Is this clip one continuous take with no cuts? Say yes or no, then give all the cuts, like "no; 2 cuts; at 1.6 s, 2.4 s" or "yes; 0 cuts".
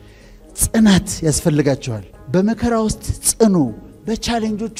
yes; 0 cuts